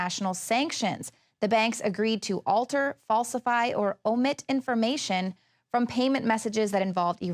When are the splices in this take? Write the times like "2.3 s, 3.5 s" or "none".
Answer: 3.9 s